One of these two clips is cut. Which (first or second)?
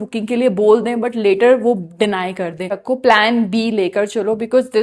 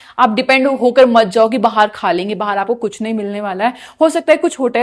first